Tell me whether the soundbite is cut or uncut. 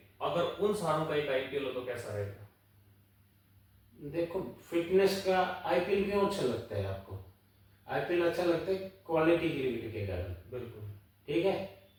uncut